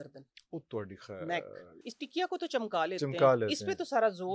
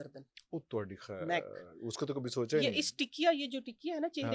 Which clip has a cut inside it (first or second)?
first